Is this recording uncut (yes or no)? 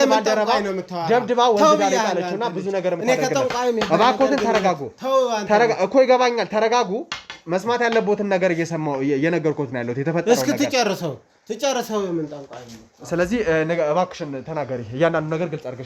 yes